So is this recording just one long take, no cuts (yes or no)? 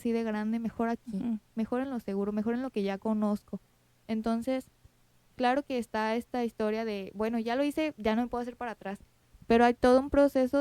yes